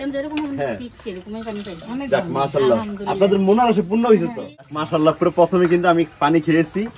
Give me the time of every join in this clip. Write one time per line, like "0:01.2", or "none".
0:04.8